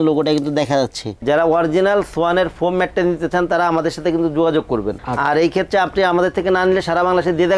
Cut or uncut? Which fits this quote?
cut